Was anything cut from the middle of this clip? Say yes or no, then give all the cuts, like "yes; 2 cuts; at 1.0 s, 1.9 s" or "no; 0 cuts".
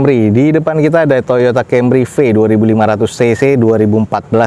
no; 0 cuts